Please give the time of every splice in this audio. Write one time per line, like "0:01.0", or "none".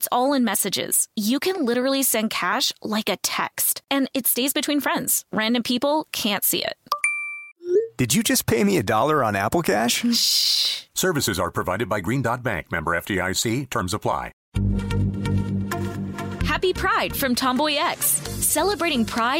0:14.4